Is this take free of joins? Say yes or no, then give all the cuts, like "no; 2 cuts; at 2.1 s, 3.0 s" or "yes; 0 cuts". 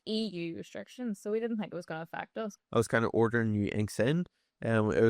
no; 1 cut; at 2.5 s